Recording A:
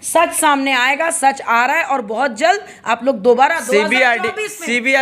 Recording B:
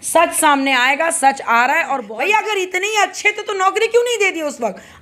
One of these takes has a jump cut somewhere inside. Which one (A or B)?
B